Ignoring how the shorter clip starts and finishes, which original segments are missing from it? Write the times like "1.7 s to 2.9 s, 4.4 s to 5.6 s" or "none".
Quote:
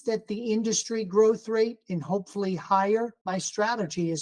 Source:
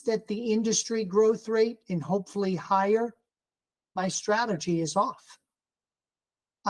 3.2 s to 3.9 s